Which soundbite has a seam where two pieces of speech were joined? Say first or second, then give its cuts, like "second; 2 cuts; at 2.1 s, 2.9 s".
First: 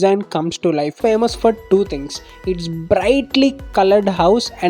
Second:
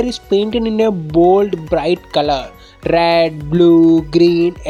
first; 1 cut; at 1.0 s